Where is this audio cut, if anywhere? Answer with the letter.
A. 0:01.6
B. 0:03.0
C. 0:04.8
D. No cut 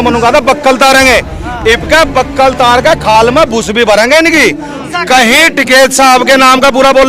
C